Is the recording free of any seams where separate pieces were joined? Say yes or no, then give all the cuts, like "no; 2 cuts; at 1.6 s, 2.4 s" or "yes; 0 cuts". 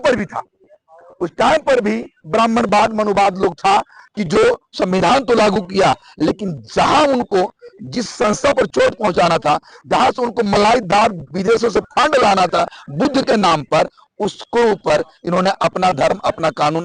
yes; 0 cuts